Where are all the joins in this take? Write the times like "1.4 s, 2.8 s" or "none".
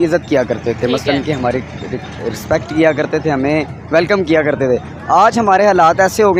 none